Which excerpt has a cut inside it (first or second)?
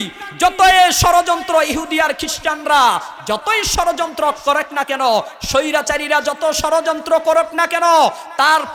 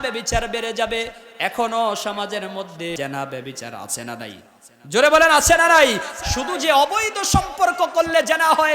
second